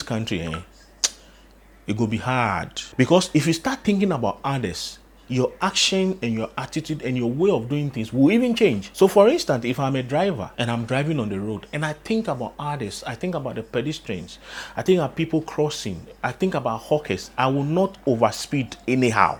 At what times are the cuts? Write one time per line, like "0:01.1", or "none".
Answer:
none